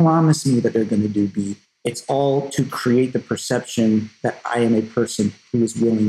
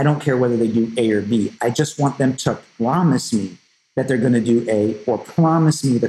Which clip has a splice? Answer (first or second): first